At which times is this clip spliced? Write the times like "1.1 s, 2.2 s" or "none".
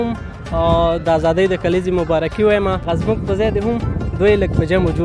2.8 s